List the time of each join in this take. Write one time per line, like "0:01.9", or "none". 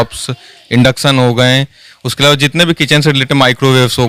none